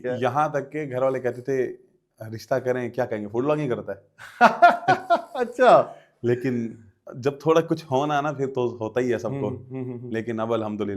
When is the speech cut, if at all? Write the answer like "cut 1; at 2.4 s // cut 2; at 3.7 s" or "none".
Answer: none